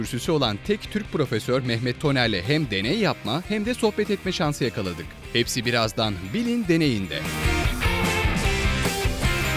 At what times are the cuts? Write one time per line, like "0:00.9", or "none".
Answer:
none